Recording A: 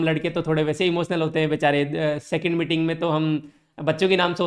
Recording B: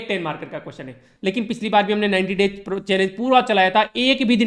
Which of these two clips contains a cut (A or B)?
B